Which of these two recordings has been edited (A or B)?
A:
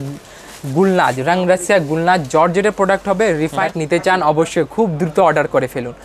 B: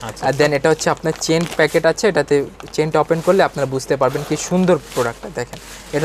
A